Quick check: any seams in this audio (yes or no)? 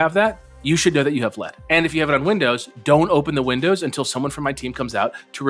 yes